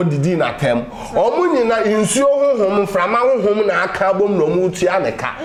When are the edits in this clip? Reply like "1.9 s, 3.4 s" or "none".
none